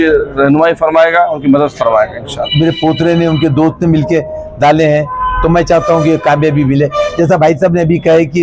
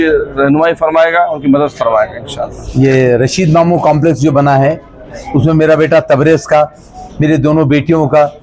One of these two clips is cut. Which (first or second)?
first